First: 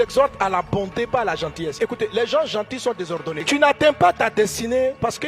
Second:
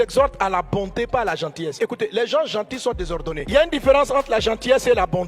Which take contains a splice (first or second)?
first